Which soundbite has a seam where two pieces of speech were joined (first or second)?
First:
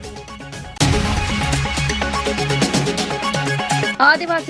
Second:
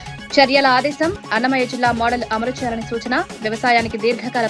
first